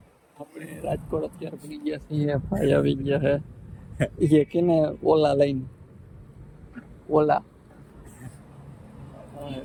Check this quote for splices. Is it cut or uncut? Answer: uncut